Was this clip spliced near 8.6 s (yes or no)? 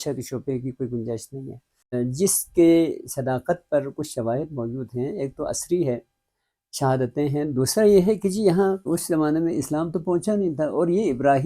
no